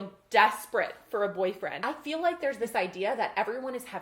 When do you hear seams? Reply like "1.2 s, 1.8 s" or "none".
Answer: 1.8 s